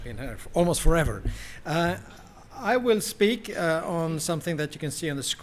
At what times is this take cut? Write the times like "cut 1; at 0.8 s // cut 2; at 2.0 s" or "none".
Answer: cut 1; at 1.8 s